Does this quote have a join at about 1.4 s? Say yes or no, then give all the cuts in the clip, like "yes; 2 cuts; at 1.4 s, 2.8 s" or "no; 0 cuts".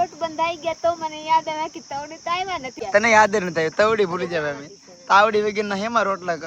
no; 1 cut; at 2.8 s